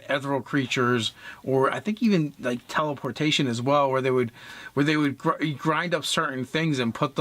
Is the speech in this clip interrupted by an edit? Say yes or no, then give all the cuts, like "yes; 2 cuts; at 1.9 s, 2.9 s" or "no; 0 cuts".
yes; 1 cut; at 4.7 s